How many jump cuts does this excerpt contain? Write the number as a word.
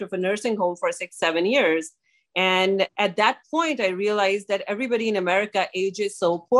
one